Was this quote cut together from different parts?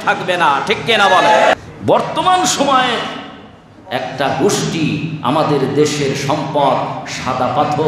yes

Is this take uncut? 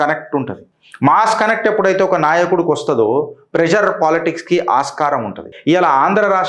no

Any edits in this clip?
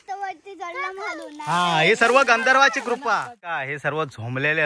yes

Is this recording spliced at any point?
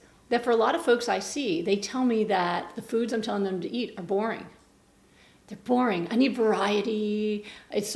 no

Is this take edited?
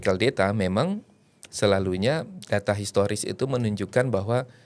no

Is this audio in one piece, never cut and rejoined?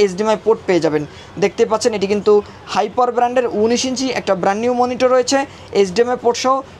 yes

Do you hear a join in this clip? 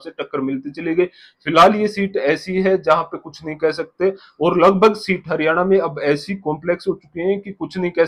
no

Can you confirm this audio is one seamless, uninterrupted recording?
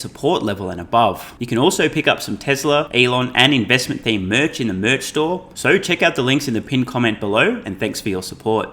no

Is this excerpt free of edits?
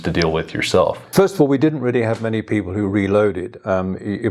no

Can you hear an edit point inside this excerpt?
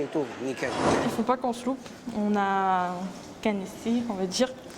yes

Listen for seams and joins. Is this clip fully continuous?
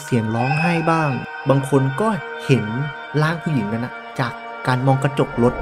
yes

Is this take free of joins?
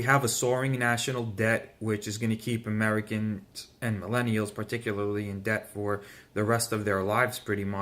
no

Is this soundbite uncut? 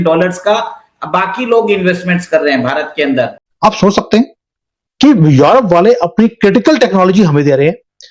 no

